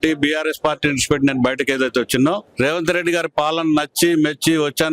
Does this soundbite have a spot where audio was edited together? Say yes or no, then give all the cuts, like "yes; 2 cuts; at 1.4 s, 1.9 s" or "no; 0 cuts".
yes; 1 cut; at 2.5 s